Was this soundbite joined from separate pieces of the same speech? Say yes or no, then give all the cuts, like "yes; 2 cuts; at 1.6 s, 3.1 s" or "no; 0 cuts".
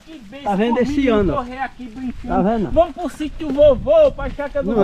no; 0 cuts